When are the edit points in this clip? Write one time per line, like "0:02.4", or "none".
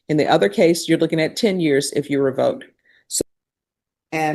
0:03.2